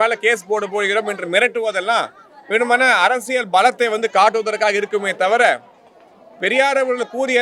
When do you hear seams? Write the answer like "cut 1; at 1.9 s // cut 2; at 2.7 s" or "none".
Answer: none